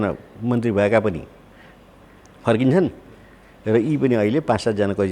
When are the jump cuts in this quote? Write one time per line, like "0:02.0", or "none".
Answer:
none